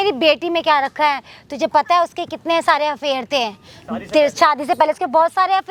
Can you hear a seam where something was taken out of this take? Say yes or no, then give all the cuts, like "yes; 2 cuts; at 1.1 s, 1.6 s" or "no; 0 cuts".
no; 0 cuts